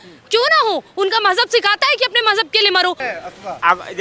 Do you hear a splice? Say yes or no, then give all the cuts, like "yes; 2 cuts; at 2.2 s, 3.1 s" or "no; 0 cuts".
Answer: yes; 1 cut; at 3.1 s